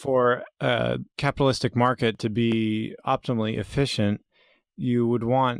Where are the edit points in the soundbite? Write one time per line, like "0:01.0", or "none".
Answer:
0:01.1